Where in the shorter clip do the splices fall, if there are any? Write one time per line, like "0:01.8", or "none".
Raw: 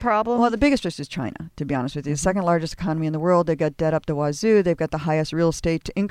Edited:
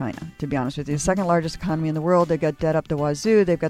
none

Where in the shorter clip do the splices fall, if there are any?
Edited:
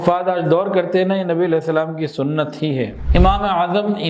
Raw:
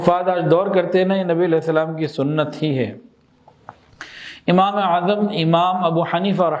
0:03.0

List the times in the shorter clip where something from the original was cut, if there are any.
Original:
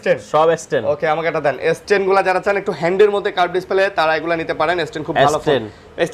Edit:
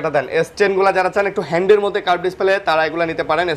none

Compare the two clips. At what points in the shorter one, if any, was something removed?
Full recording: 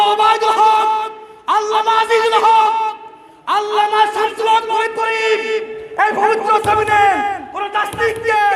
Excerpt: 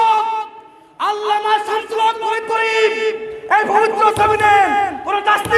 none

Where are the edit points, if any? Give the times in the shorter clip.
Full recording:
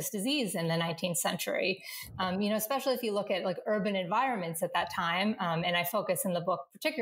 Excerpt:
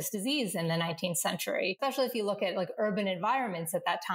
0:01.8

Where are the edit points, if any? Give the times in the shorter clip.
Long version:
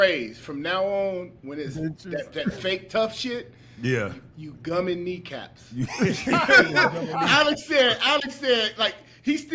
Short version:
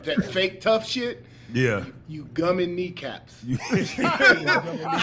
none

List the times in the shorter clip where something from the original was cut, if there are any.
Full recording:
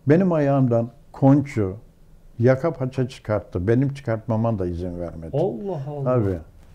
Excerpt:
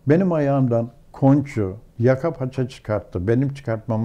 0:01.8

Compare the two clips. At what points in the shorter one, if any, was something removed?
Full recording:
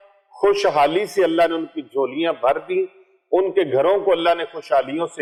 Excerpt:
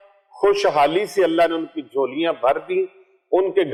none

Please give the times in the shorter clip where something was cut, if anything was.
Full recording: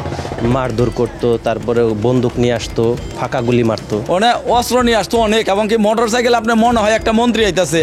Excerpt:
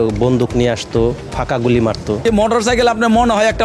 0:02.2

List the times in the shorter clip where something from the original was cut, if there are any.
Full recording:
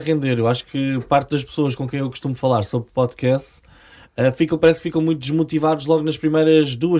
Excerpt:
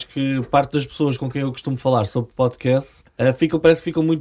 0:03.0

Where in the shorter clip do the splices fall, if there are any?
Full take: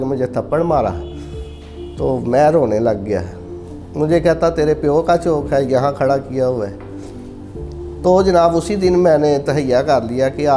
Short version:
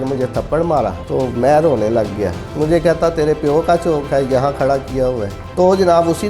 0:01.0
0:02.4
0:05.4

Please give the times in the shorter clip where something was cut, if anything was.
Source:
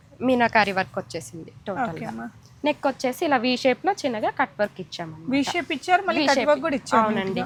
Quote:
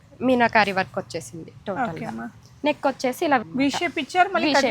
0:03.4

